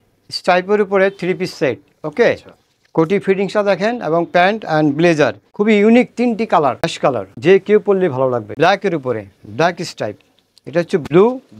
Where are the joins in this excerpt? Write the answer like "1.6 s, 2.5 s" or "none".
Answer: 5.4 s, 7.4 s, 8.5 s